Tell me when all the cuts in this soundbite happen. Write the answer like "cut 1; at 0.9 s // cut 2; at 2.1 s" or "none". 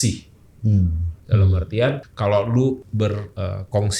cut 1; at 1.1 s // cut 2; at 2.1 s // cut 3; at 3.0 s